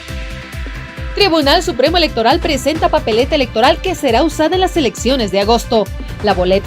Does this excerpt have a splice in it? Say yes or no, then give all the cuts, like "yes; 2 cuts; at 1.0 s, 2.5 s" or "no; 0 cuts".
yes; 1 cut; at 1.1 s